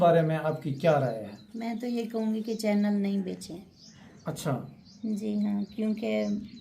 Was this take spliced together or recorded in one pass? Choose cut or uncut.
cut